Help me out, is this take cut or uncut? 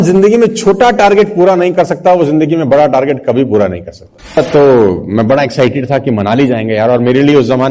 cut